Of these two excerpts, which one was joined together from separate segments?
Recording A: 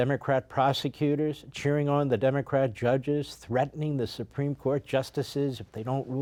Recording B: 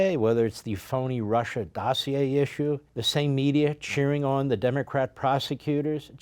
B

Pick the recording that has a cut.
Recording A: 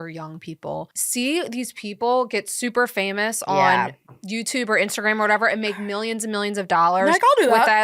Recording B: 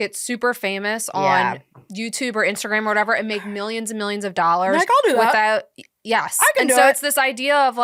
A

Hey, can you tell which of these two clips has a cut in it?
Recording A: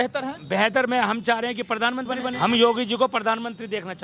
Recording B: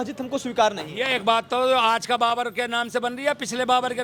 A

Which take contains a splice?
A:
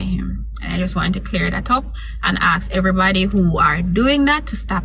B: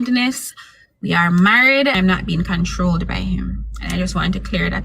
B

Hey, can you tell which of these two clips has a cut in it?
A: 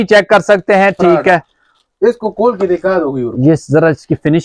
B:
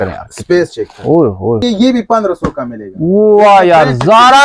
B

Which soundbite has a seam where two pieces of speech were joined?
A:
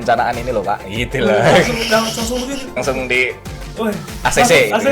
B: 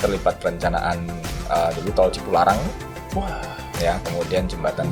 A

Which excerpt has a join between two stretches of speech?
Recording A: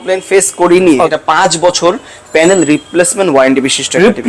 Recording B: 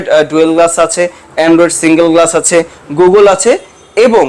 A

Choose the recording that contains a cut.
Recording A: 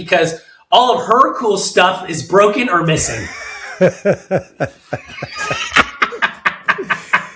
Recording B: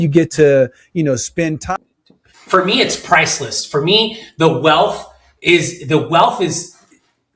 B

